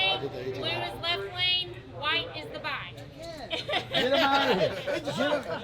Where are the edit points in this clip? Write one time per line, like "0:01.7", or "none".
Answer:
0:03.0